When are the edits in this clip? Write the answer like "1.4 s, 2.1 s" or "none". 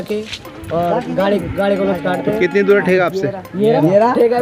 none